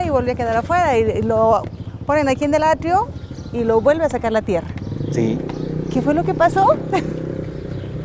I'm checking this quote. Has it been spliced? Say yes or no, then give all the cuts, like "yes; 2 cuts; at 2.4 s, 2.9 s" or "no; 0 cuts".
no; 0 cuts